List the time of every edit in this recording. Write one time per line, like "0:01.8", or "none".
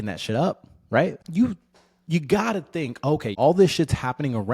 0:01.2
0:03.3